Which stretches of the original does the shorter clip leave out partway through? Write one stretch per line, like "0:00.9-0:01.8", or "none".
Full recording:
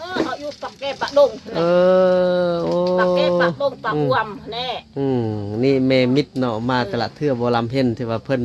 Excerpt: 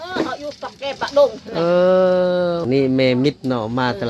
0:02.6-0:05.5